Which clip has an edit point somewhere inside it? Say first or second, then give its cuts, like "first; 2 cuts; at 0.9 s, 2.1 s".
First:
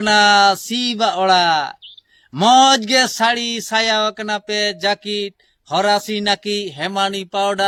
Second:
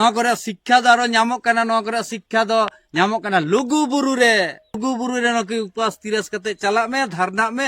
second; 1 cut; at 4.8 s